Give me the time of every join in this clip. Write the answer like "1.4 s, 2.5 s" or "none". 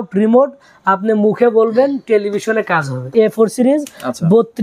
3.1 s